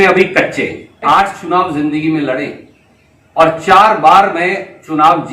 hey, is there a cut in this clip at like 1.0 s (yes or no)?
yes